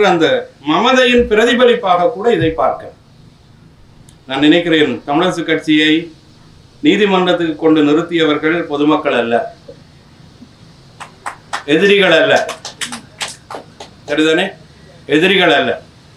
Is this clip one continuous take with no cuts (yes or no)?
yes